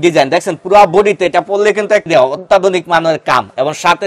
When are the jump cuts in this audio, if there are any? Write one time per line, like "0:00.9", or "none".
0:02.0

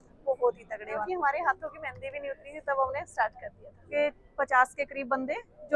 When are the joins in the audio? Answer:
0:01.0
0:03.9

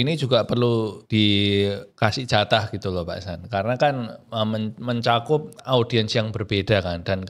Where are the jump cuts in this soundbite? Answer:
0:01.0
0:01.9

